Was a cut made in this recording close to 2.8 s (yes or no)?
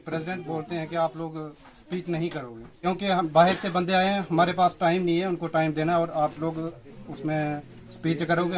yes